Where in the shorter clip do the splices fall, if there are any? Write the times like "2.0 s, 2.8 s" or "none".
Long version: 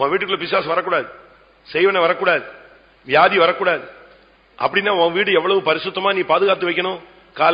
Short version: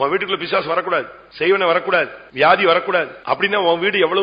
1.2 s, 2.2 s, 3.1 s